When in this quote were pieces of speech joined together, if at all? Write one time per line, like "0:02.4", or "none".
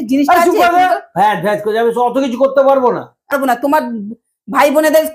0:03.3